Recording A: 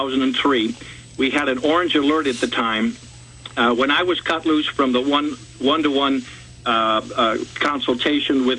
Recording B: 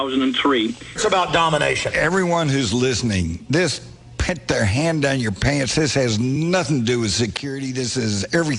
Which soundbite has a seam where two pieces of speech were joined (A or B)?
A